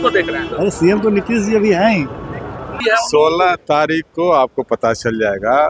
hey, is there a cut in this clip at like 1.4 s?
no; 1 cut; at 2.8 s

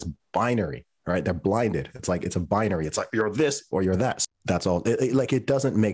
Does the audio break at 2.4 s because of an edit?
no; 1 cut; at 4.2 s

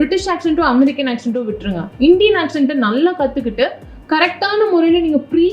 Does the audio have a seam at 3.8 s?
no; 0 cuts

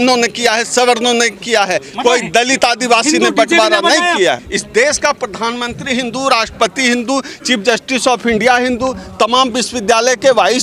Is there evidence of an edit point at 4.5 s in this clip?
yes; 1 cut; at 4.5 s

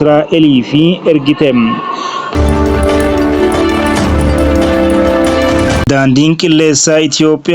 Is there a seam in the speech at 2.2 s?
yes; 2 cuts; at 2.2 s, 5.8 s

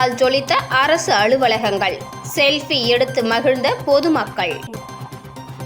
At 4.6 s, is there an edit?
yes; 1 cut; at 4.6 s

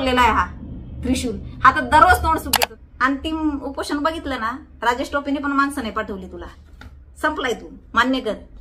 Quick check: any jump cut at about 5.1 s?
no; 1 cut; at 2.5 s

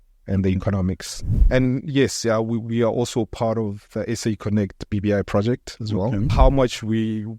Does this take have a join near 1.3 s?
yes; 2 cuts; at 1.3 s, 6.3 s

